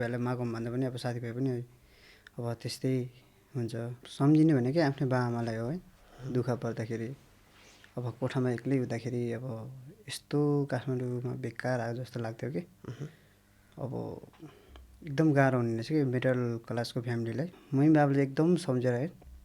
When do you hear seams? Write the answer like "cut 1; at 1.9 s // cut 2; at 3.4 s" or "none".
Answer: cut 1; at 4.0 s // cut 2; at 17.6 s